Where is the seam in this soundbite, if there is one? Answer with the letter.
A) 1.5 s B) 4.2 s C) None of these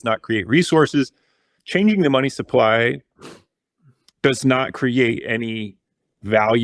A